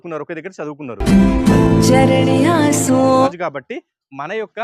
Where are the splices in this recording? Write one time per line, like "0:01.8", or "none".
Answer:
0:03.3